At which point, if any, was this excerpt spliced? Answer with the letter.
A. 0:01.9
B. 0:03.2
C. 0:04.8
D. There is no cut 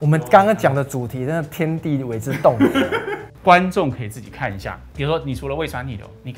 B